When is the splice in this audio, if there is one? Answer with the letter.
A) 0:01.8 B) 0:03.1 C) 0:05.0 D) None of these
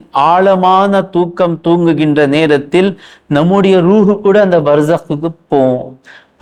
D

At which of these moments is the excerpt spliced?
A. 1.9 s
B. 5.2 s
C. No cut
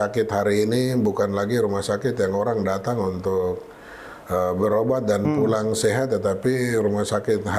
C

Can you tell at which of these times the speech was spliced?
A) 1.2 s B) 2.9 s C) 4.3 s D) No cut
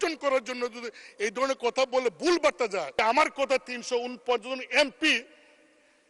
B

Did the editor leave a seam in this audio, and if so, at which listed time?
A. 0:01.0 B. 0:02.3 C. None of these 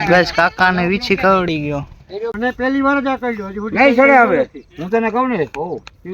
B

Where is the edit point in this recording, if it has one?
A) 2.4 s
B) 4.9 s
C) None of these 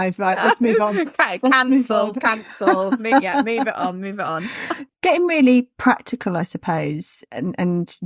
B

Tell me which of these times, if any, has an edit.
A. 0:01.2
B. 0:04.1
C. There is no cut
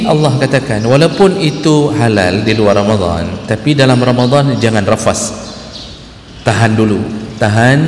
C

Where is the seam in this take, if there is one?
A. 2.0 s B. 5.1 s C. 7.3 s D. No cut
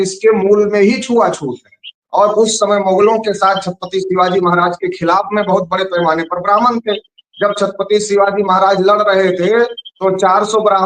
A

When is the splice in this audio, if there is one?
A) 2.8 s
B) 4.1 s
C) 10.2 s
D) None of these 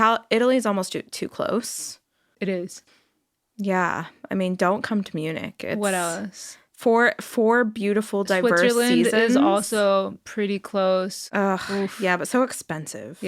A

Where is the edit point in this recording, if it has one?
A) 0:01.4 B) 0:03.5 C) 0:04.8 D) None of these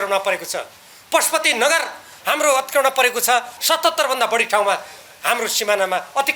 B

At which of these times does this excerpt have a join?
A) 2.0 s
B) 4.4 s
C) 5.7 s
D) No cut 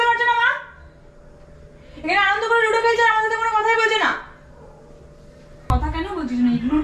C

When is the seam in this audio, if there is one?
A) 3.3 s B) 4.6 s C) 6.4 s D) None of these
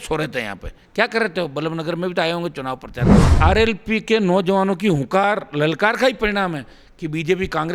A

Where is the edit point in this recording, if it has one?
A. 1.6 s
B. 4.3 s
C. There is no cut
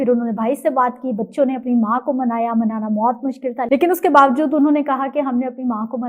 C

